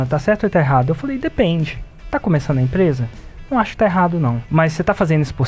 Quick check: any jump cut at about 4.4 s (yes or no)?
yes